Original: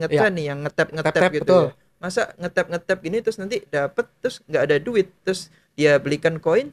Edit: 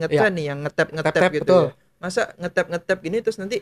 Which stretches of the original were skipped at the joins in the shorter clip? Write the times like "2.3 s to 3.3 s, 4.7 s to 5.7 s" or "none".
none